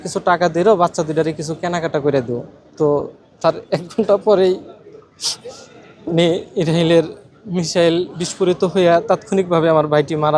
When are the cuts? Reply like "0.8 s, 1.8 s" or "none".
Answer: none